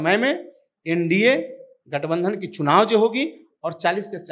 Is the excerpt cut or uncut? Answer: uncut